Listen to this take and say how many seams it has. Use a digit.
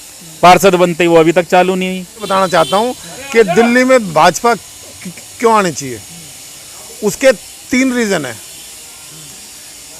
1